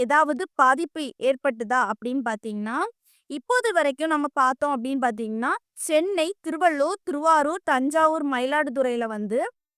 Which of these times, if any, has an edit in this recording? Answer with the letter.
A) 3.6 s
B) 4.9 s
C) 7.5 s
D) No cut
D